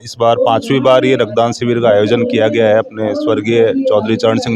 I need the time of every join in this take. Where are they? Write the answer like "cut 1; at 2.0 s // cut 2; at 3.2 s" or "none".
none